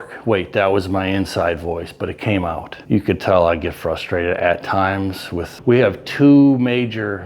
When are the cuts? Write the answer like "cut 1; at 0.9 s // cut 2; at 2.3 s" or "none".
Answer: cut 1; at 2.7 s // cut 2; at 5.5 s